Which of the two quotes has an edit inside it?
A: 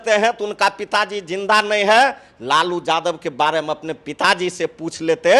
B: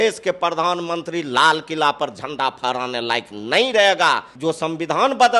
B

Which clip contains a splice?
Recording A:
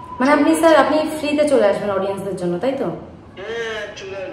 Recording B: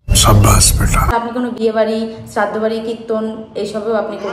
B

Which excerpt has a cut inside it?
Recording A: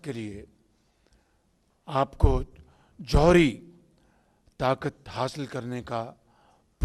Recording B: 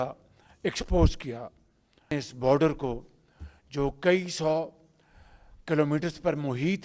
B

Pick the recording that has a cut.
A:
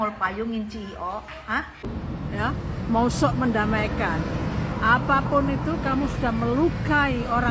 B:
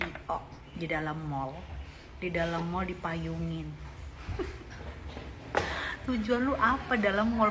A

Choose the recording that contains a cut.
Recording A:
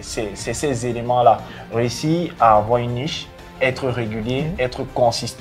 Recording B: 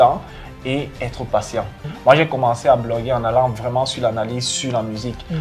B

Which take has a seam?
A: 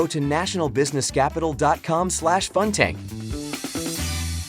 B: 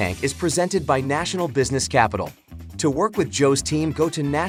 A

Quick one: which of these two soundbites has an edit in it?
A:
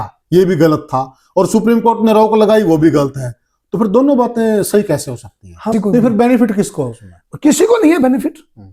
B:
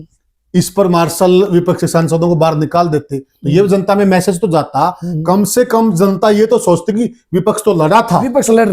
A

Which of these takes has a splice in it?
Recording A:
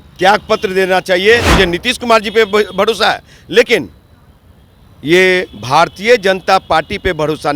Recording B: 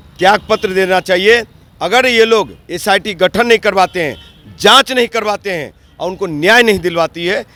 A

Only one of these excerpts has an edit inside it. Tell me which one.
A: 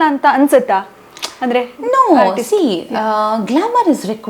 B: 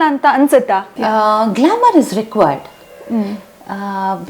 B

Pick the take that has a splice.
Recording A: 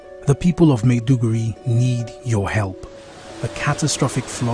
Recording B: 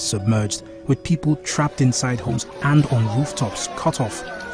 B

